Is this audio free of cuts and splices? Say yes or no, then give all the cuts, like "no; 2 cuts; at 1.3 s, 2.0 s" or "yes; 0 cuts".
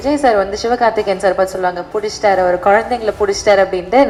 yes; 0 cuts